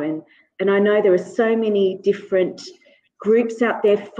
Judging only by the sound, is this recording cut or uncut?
uncut